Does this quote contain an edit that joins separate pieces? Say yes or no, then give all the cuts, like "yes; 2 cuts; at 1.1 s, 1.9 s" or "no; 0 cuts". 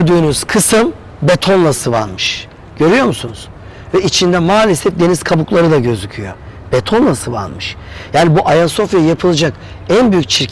no; 0 cuts